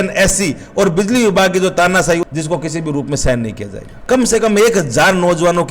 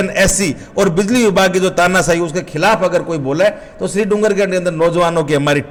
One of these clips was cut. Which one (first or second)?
first